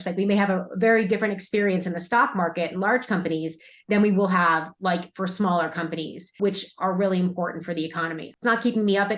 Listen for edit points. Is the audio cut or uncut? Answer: cut